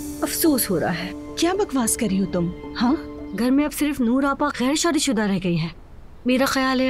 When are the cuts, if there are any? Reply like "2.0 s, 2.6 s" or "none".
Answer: 3.2 s